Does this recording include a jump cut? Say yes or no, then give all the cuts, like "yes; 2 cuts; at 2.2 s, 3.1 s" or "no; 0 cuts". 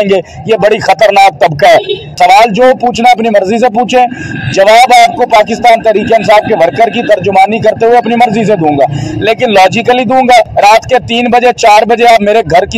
yes; 2 cuts; at 2.2 s, 10.5 s